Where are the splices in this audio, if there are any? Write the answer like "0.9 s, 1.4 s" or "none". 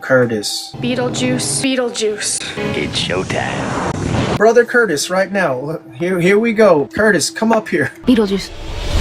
1.5 s, 2.6 s